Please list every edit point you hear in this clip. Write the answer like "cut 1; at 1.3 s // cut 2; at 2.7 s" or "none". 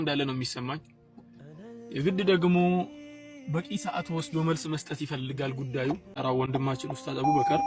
cut 1; at 6.2 s